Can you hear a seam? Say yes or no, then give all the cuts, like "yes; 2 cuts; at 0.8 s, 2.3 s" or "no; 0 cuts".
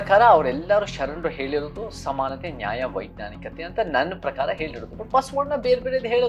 no; 0 cuts